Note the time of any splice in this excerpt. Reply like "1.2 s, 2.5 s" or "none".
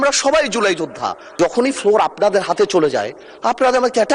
1.3 s